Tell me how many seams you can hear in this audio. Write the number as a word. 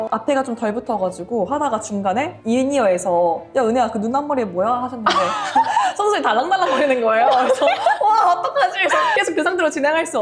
one